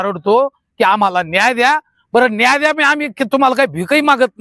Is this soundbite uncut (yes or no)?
yes